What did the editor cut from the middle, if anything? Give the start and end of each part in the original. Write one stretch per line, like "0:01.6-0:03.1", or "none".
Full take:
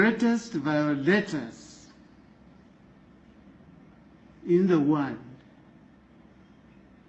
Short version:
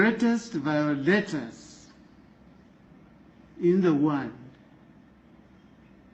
0:02.9-0:03.8